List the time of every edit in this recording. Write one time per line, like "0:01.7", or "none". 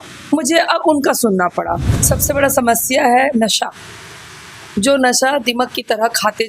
0:01.9